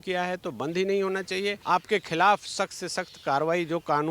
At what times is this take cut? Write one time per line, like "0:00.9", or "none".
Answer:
0:01.6